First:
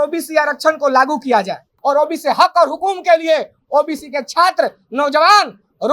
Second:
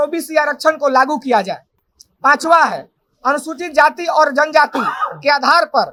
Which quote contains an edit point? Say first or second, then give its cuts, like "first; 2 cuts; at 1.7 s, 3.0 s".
first; 1 cut; at 1.7 s